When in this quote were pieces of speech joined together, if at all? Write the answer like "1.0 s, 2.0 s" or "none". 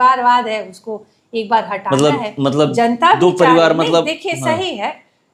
none